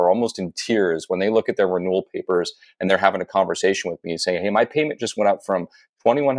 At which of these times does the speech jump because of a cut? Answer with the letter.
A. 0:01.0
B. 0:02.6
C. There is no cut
C